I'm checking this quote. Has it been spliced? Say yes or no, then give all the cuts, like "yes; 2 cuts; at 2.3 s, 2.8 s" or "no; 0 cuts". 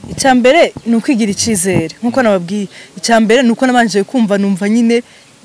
no; 0 cuts